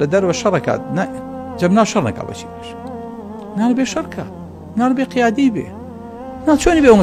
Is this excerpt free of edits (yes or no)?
yes